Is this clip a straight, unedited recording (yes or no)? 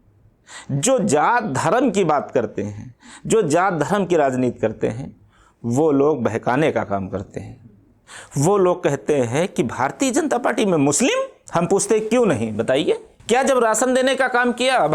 no